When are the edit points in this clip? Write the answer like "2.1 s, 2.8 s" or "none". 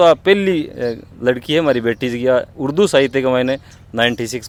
none